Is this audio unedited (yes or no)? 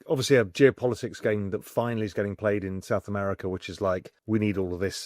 no